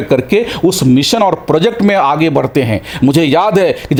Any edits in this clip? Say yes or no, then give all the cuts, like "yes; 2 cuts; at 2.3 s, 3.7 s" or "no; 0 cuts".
no; 0 cuts